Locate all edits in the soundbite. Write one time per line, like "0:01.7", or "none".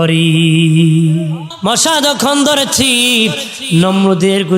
0:01.5